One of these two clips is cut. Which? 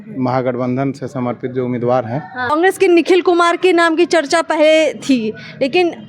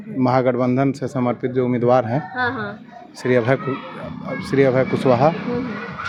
first; 1 cut; at 2.5 s

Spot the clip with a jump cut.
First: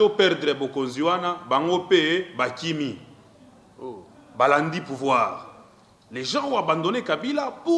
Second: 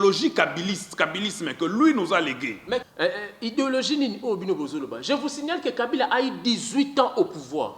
second; 1 cut; at 2.8 s

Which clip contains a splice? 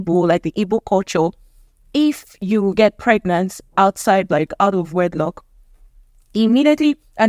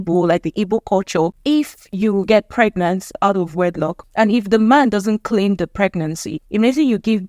second; 4 cuts; at 1.4 s, 3.1 s, 4.0 s, 6.3 s

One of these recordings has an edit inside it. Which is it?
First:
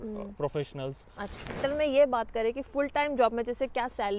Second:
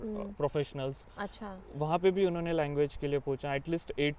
first; 1 cut; at 1.6 s

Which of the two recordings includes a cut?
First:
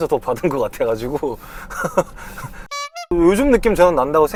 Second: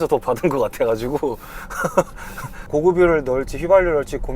second; 1 cut; at 2.7 s

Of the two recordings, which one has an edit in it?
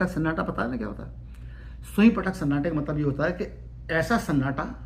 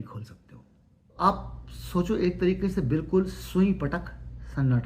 second; 1 cut; at 1.2 s

